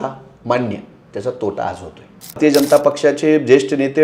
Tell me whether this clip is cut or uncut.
cut